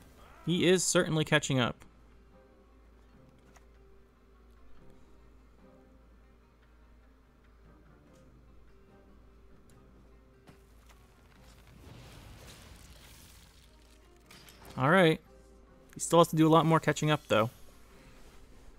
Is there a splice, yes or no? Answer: no